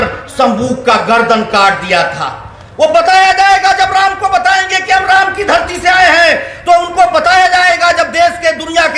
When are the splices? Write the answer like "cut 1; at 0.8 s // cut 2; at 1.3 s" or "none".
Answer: none